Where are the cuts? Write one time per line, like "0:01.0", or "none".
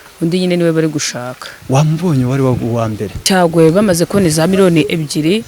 0:03.1